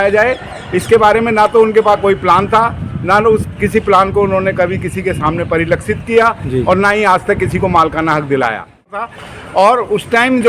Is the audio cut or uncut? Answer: cut